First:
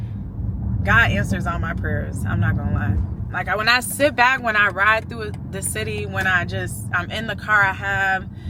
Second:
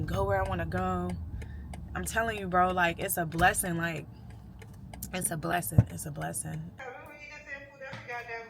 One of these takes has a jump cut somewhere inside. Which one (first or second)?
second